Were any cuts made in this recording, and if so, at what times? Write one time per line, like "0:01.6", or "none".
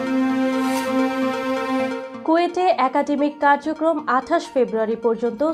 0:02.1